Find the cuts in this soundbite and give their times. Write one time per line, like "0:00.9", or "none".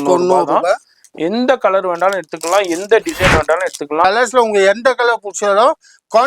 0:04.0

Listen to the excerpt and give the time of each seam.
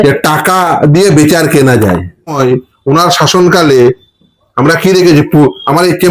0:02.3

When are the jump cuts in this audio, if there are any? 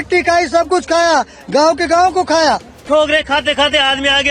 0:02.8

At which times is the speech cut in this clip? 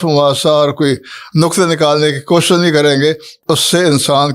0:03.3

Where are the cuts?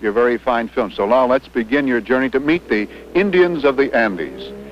none

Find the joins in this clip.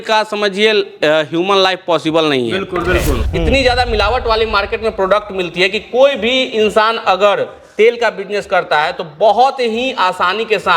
0:03.2

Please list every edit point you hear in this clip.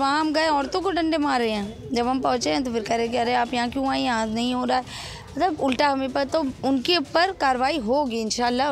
none

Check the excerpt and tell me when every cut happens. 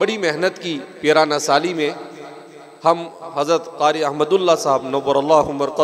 none

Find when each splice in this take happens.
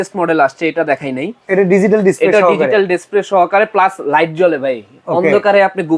none

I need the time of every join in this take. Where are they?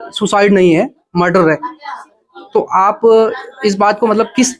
none

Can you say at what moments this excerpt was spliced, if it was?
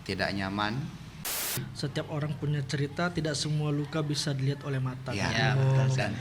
0:01.3

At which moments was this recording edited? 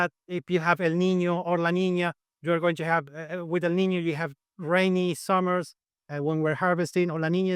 none

